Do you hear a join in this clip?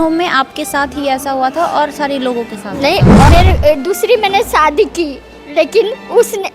yes; 1 cut; at 3.3 s

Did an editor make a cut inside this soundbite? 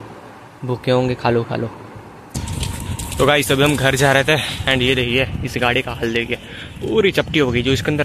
yes; 1 cut; at 2.2 s

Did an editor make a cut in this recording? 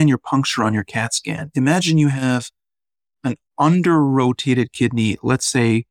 no; 0 cuts

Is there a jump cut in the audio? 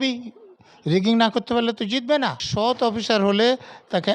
yes; 1 cut; at 2.5 s

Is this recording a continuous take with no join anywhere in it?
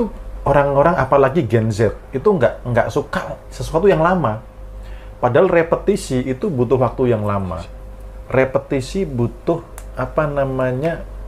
yes; 0 cuts

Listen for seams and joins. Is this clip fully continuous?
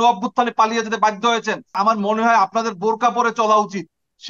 no; 1 cut; at 1.8 s

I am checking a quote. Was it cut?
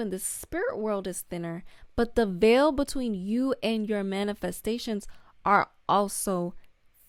no; 0 cuts

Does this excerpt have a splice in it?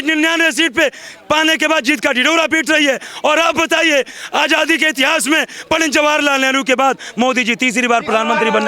no; 0 cuts

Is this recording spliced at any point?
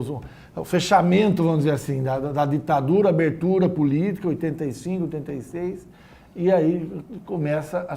yes; 1 cut; at 5.9 s

